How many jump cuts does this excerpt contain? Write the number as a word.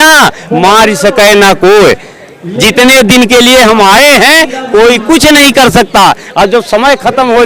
zero